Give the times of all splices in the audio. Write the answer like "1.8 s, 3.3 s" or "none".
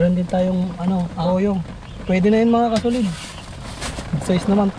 1.2 s

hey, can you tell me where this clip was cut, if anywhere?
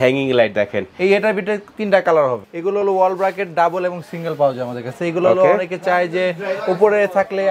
2.4 s

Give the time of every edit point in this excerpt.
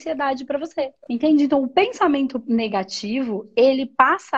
1.0 s

